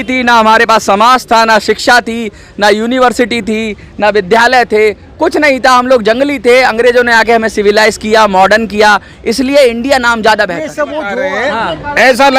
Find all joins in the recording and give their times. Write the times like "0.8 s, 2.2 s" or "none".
11.0 s